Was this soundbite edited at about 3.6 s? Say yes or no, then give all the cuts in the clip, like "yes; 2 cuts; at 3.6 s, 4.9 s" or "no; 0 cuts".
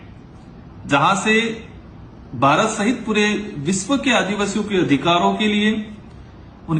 no; 1 cut; at 1.1 s